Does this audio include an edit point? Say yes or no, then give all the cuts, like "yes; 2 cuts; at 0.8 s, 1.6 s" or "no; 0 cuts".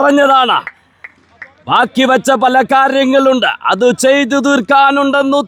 no; 0 cuts